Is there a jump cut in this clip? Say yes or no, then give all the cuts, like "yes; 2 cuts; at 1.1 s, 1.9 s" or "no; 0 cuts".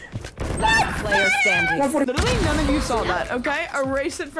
yes; 1 cut; at 2.1 s